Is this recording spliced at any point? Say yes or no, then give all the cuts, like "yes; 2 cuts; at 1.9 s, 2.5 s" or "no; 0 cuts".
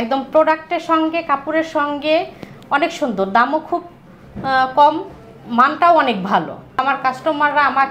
yes; 1 cut; at 6.8 s